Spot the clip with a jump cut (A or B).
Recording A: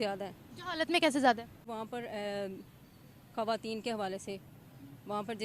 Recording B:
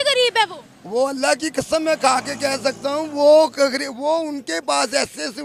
A